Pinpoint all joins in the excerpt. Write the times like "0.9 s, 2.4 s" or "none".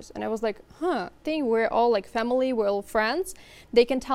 1.2 s